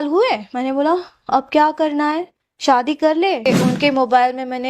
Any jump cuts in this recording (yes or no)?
yes